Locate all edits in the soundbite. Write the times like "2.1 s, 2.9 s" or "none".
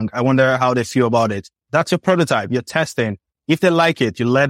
1.7 s